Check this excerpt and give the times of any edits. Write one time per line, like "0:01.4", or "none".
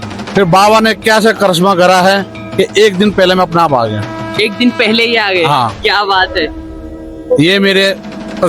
none